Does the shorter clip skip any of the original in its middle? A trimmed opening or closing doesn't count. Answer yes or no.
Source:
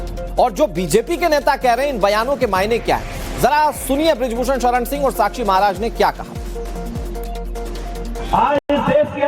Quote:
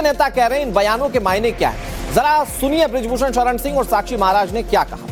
no